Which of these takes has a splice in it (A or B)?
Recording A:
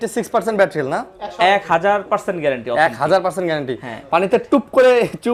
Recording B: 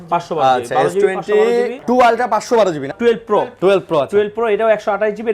B